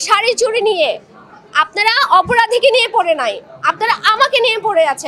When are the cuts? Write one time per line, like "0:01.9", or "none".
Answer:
none